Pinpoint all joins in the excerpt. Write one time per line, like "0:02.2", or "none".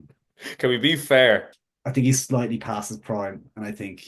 0:01.5